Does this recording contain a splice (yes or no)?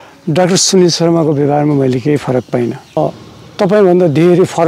yes